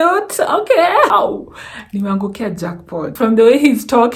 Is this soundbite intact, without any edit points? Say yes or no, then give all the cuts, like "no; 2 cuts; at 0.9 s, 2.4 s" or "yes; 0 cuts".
no; 2 cuts; at 1.1 s, 3.0 s